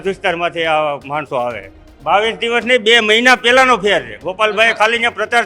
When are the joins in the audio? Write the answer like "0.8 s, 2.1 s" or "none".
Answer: 1.9 s